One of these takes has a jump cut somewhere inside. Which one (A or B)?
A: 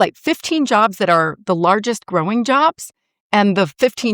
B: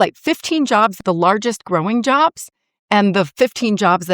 B